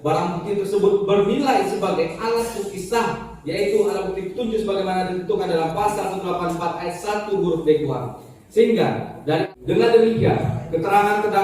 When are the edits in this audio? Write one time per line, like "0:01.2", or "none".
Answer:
0:09.5